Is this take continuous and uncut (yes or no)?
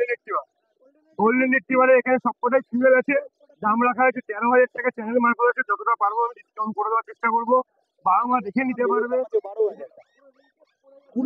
no